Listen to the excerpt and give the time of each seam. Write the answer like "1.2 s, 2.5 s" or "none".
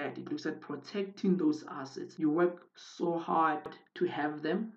3.8 s